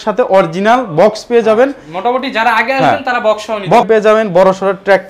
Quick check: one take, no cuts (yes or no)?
no